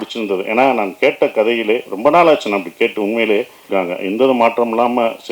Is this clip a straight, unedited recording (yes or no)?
no